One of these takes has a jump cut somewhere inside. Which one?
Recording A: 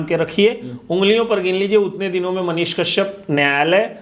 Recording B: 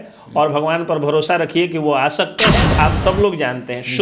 B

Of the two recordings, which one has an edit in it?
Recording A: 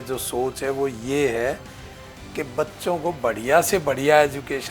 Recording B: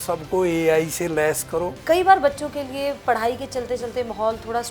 B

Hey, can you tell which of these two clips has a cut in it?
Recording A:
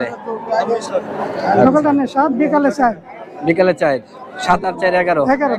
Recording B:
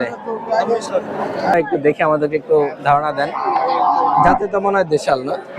B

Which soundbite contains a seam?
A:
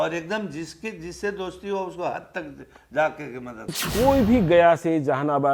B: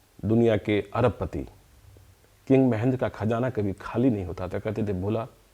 A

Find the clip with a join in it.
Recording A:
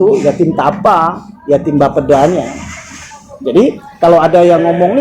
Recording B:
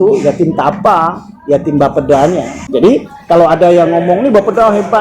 B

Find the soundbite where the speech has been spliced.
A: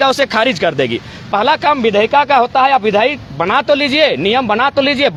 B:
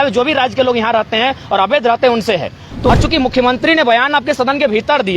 B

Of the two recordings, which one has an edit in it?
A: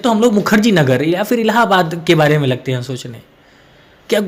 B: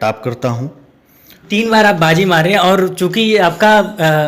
B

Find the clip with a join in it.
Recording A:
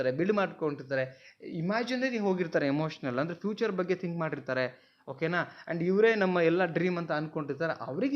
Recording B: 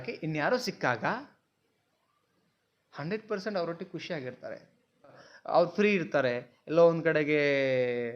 B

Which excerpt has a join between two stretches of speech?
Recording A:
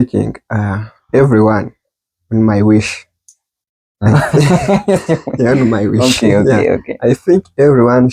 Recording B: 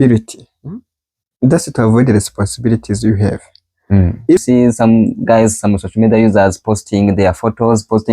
B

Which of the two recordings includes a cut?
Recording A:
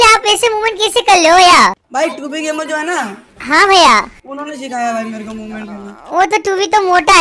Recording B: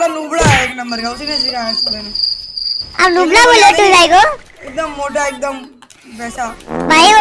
A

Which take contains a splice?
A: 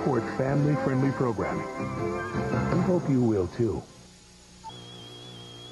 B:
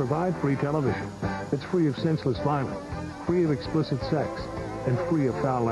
B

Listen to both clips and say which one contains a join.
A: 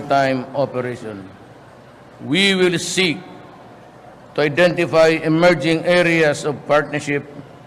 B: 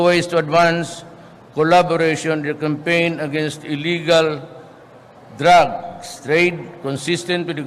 A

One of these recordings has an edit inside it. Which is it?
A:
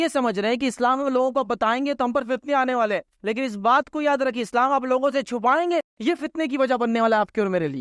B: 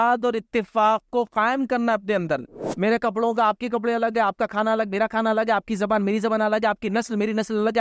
B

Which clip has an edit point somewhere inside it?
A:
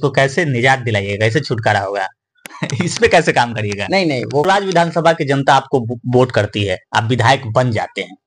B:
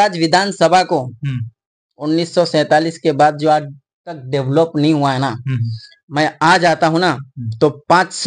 A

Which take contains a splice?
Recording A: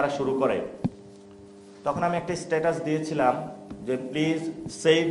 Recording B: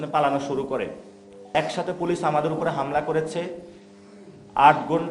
B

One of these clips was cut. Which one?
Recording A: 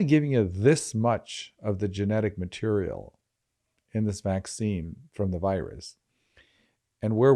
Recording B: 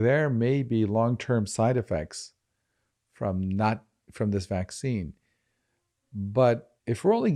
A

